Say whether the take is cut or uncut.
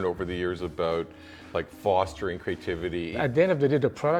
cut